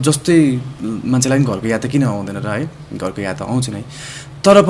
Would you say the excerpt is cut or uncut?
uncut